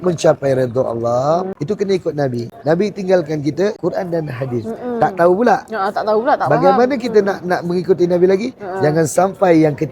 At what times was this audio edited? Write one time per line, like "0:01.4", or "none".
0:01.5
0:02.5
0:03.8